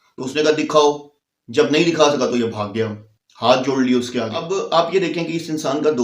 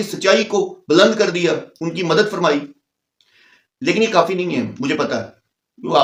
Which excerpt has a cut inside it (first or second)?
first